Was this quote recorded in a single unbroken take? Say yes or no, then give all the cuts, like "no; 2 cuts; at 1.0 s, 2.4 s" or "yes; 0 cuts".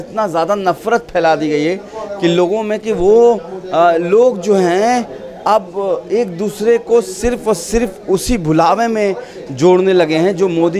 yes; 0 cuts